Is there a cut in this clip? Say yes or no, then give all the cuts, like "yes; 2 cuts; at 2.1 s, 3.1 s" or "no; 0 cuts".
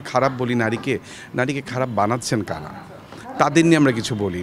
no; 0 cuts